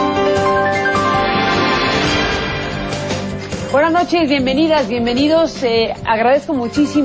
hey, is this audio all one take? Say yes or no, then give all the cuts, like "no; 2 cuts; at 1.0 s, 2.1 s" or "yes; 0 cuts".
yes; 0 cuts